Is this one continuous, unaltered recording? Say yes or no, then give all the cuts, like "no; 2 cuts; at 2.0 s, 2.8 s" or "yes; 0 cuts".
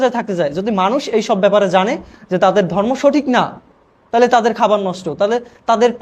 yes; 0 cuts